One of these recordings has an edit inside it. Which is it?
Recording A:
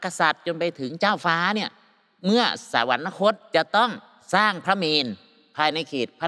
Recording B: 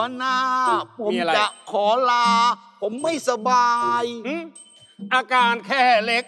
A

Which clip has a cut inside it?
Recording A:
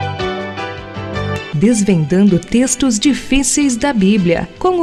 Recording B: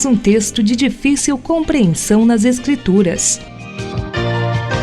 B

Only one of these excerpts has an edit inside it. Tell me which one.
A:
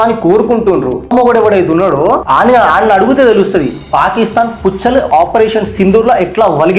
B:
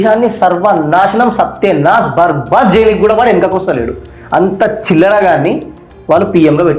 A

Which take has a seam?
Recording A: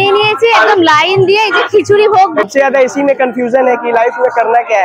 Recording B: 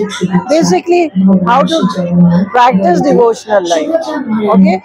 A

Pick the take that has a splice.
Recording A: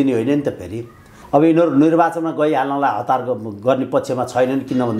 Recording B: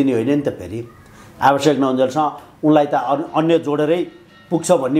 A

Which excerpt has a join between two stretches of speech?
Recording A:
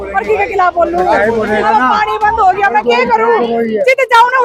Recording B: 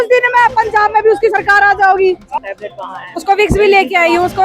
B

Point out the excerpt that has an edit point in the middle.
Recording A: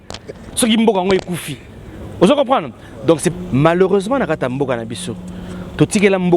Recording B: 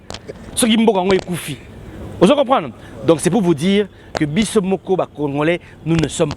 A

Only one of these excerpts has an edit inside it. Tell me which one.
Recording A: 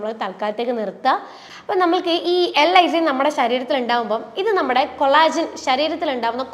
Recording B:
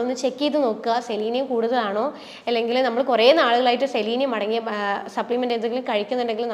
A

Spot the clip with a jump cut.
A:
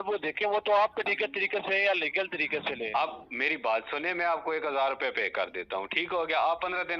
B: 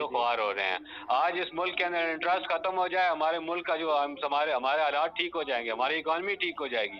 A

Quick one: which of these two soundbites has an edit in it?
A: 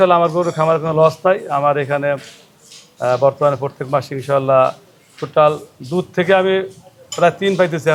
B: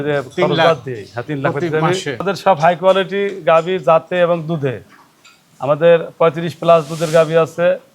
B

